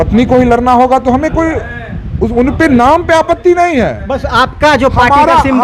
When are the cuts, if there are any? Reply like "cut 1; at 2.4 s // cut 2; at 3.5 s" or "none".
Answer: none

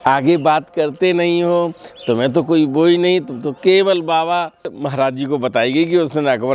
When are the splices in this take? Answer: cut 1; at 4.7 s

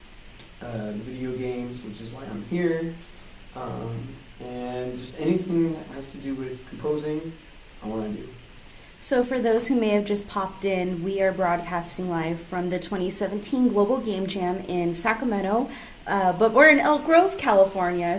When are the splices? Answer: cut 1; at 10.8 s

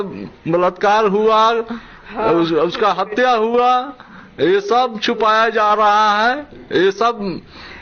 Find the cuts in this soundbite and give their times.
none

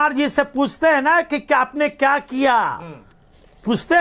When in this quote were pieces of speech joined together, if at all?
none

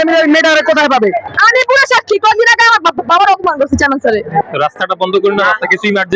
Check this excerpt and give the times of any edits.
cut 1; at 1.3 s // cut 2; at 4.4 s

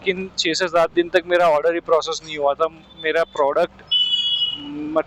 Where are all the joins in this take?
none

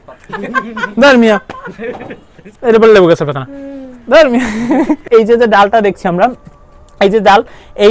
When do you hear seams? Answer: cut 1; at 5.0 s

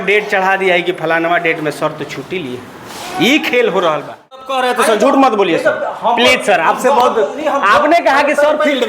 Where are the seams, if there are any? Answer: cut 1; at 4.5 s

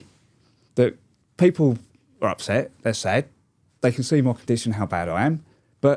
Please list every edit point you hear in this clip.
none

